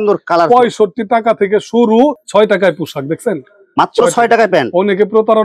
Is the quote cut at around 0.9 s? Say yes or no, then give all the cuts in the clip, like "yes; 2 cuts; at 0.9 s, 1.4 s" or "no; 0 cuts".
no; 1 cut; at 2.2 s